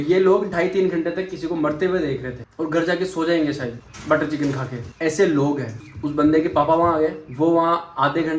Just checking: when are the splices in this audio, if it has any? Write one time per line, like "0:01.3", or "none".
none